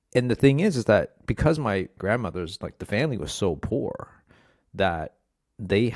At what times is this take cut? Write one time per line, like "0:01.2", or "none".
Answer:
0:01.9

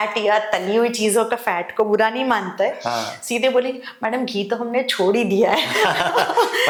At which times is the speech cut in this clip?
none

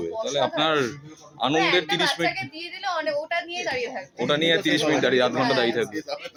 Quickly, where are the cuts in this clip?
none

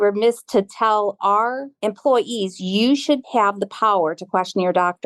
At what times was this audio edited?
0:01.7
0:03.2

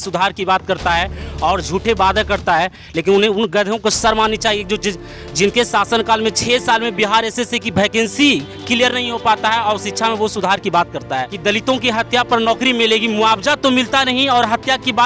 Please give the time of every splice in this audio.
0:11.3

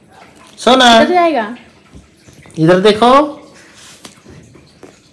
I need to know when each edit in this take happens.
none

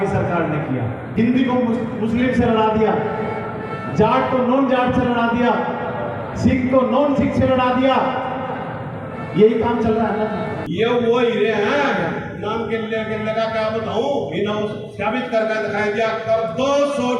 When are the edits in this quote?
0:01.1
0:10.6

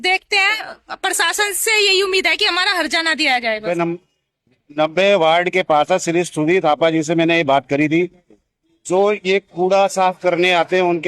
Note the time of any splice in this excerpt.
0:03.6

